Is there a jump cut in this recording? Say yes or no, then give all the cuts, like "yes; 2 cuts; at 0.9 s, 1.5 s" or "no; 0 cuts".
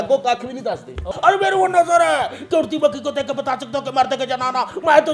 yes; 1 cut; at 1.1 s